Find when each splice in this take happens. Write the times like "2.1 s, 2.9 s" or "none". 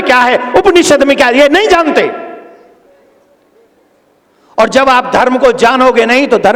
none